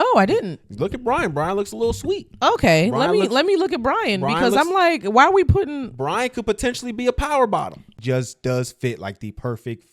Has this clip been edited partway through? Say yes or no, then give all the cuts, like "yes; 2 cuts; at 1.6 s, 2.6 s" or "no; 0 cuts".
yes; 1 cut; at 7.8 s